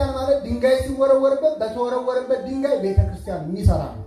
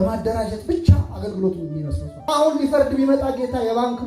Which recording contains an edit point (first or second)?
second